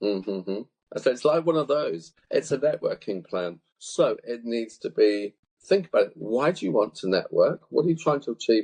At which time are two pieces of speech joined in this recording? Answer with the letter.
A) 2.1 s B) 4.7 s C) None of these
A